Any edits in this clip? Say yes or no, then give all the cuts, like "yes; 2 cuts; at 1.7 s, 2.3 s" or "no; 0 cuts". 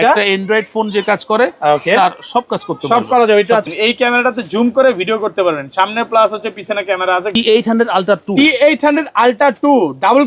yes; 2 cuts; at 3.7 s, 7.4 s